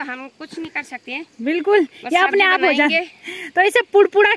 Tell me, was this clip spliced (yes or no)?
no